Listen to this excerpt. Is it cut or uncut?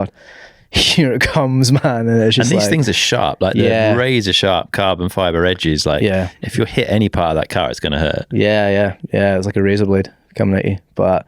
uncut